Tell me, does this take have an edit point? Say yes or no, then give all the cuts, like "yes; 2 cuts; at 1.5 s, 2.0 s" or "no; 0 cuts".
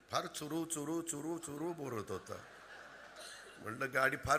no; 0 cuts